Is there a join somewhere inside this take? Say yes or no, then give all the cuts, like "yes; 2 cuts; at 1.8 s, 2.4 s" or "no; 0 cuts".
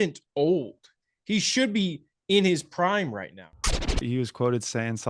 yes; 1 cut; at 3.7 s